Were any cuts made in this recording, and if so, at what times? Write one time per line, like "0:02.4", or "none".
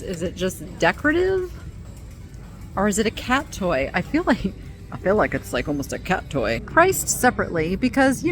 0:06.6